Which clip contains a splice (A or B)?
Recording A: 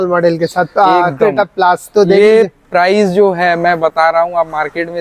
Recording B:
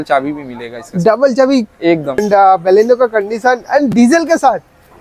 B